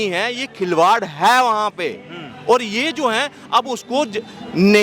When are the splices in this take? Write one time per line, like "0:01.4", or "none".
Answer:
none

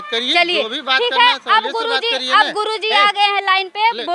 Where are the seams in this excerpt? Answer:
none

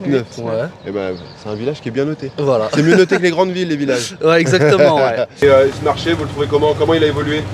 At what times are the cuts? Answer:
0:05.3

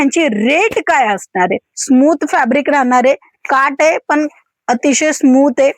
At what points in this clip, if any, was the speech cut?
0:01.7

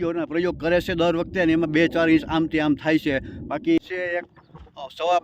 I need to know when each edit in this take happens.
0:03.8

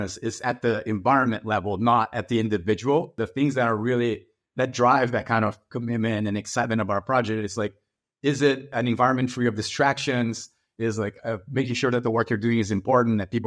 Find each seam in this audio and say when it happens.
0:03.1
0:08.7

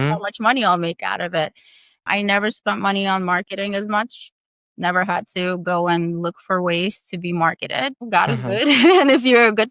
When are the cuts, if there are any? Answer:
0:02.0

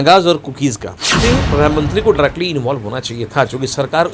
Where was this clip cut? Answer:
0:01.1

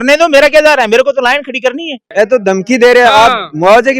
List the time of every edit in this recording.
0:02.0

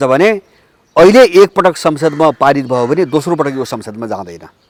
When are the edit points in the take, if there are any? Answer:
none

